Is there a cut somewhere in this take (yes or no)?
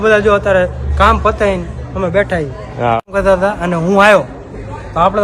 yes